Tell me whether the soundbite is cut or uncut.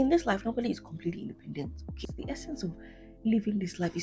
cut